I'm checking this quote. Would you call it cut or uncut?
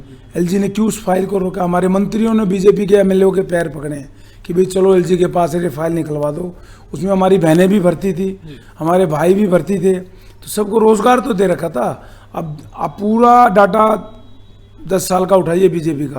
uncut